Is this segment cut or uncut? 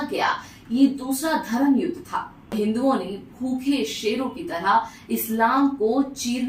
cut